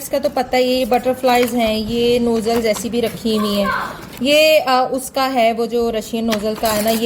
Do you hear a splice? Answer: no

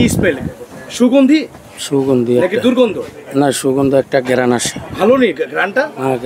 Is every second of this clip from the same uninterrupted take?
yes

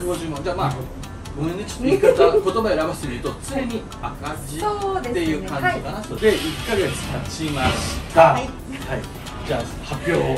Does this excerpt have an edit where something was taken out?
yes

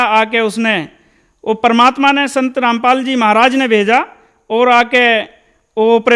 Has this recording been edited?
no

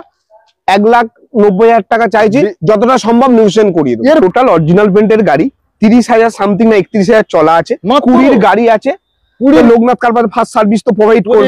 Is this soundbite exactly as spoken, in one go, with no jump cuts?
no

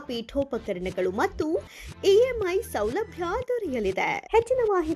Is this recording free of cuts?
yes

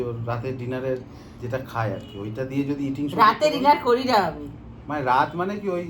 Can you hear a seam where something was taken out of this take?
no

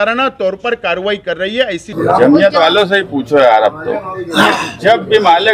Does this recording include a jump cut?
yes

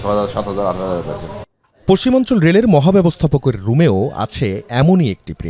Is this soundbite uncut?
yes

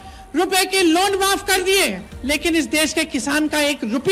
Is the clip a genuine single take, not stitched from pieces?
no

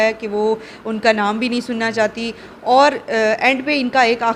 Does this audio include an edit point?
no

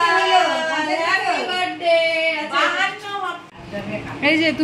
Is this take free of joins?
no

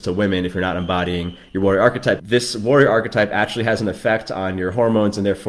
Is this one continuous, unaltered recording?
no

